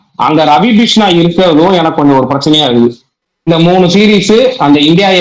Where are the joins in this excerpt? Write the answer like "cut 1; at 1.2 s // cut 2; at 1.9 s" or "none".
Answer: cut 1; at 3.5 s